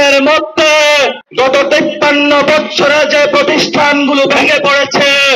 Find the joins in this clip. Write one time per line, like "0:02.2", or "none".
0:01.2